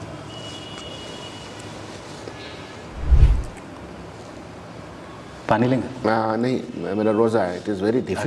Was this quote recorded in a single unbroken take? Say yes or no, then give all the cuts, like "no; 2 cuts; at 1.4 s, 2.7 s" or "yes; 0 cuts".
yes; 0 cuts